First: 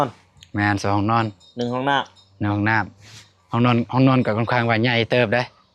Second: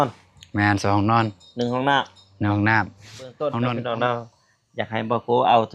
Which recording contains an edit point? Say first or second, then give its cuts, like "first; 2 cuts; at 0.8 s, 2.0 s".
second; 1 cut; at 3.5 s